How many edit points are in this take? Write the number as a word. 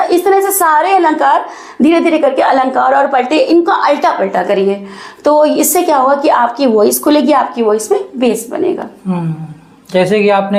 zero